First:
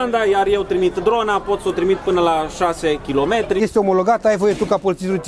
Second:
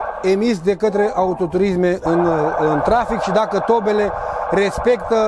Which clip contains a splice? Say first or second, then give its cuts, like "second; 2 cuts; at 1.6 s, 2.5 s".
first; 1 cut; at 3.5 s